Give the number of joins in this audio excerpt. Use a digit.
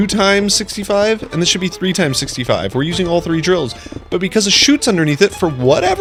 0